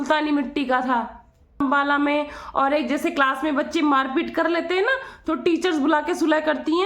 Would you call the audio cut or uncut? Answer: cut